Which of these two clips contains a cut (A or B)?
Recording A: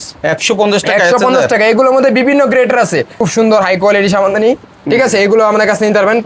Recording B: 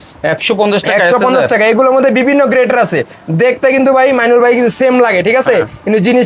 A